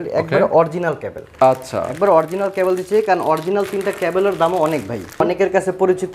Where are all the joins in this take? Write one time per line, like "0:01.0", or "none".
0:05.2